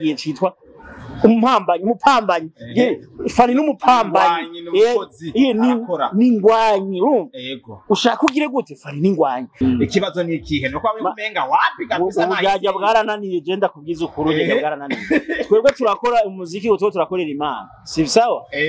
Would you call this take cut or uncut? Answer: cut